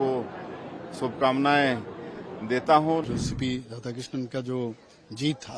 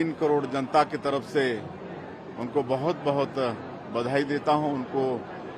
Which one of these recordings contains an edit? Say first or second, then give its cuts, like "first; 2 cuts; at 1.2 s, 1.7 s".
first; 1 cut; at 3.0 s